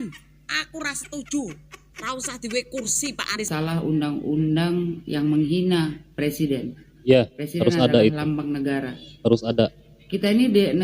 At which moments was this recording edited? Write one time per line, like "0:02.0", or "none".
0:03.4